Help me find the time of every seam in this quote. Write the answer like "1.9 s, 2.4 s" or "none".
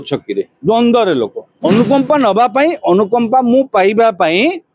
1.4 s